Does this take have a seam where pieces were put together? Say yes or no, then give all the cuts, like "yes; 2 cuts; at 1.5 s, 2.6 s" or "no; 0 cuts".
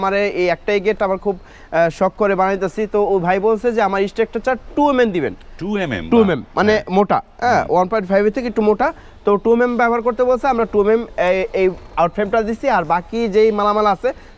no; 0 cuts